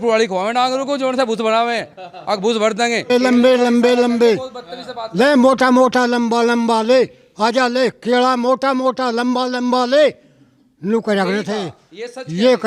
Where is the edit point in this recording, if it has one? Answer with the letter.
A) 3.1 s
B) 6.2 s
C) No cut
A